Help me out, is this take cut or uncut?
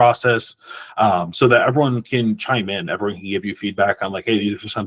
uncut